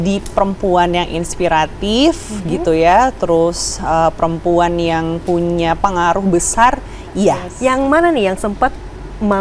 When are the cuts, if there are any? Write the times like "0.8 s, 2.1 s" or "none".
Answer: 7.5 s